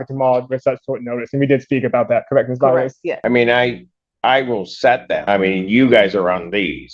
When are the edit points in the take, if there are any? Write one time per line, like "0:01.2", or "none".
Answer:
0:03.2
0:05.2